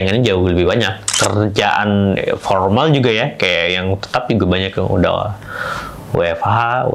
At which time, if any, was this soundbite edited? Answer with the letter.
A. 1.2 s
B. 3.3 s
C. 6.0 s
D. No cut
A